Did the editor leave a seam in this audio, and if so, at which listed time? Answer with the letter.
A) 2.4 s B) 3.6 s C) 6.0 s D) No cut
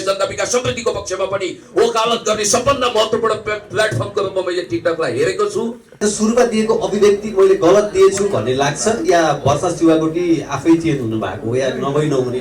C